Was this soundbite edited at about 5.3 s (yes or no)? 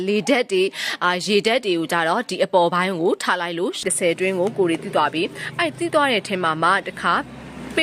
no